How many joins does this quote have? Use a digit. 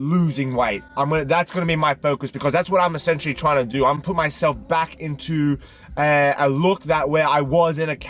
1